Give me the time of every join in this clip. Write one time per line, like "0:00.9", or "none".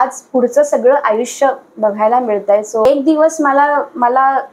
0:02.9